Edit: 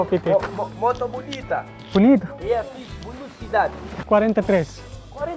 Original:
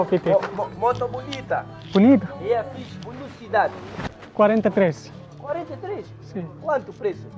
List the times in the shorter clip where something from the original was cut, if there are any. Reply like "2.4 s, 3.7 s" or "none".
3.9 s

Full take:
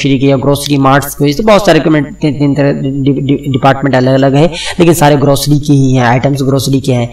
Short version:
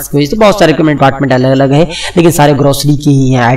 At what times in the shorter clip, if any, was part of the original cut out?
1.0 s

